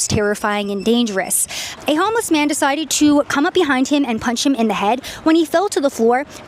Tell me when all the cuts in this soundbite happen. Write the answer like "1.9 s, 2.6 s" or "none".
1.7 s

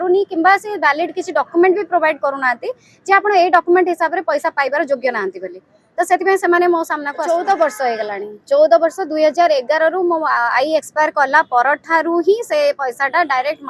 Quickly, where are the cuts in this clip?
7.1 s

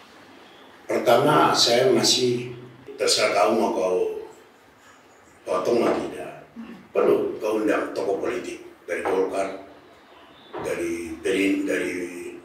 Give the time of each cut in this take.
2.9 s

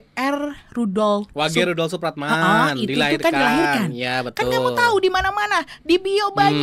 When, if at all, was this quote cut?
none

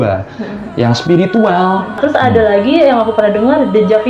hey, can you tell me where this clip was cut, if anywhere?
2.0 s

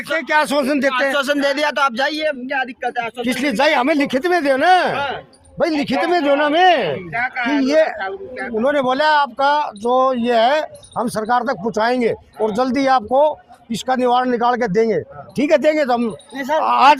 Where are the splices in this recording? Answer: none

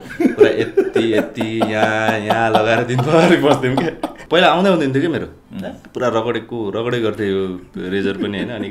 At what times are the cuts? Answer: 4.2 s

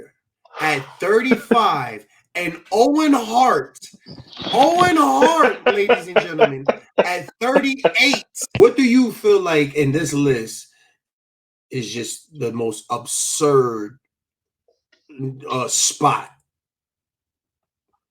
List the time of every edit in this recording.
8.6 s

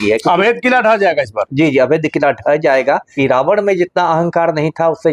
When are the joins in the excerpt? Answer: 3.1 s

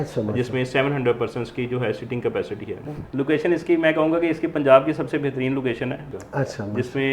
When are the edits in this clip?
2.9 s, 6.0 s

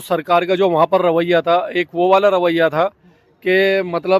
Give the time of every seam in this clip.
none

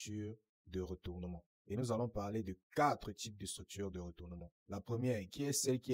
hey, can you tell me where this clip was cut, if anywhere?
none

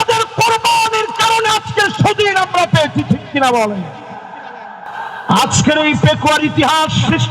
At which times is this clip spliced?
4.9 s

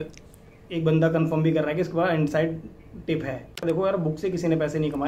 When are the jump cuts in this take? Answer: 3.6 s

